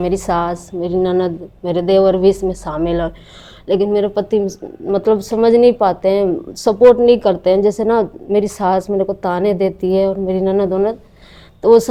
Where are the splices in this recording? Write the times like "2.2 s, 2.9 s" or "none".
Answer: none